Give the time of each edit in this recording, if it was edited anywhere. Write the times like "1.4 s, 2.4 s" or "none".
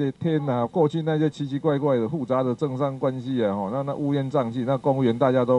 none

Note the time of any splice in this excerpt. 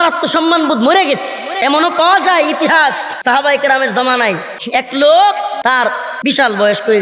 1.4 s, 3.1 s, 4.5 s, 5.7 s

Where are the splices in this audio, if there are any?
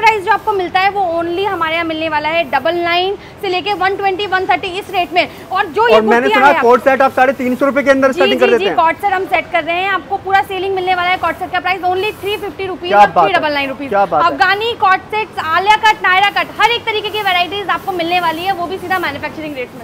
none

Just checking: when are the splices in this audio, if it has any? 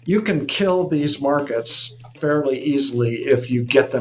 none

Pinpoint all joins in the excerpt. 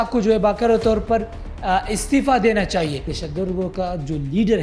3.2 s

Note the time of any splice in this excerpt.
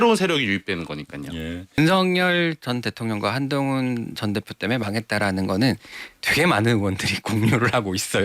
1.8 s

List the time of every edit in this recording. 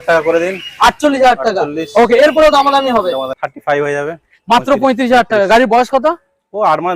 3.4 s

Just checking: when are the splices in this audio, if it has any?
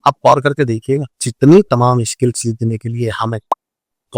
1.2 s

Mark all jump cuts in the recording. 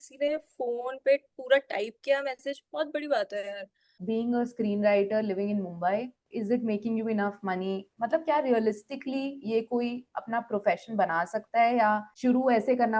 4.0 s, 6.2 s, 12.1 s

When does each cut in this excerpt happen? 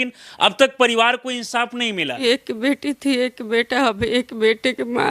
2.1 s

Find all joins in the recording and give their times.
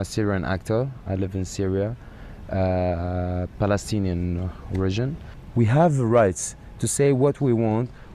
1.5 s

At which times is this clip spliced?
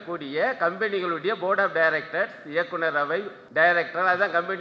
3.4 s

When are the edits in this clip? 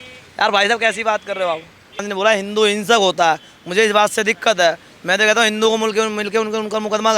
2.1 s

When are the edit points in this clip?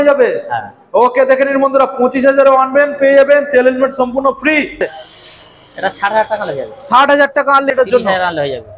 4.8 s, 7.7 s

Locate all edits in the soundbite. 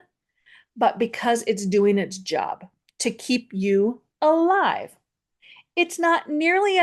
none

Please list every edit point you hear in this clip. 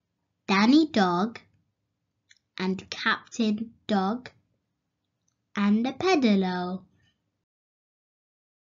2.9 s

